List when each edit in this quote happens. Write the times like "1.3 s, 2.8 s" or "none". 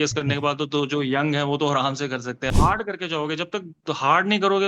2.5 s